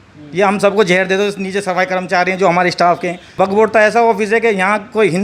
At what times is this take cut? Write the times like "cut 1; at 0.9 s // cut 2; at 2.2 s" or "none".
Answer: cut 1; at 3.2 s